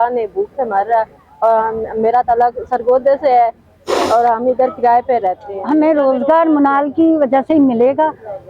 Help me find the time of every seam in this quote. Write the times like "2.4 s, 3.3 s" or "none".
5.5 s